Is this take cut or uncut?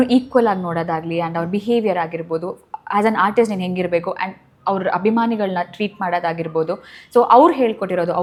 uncut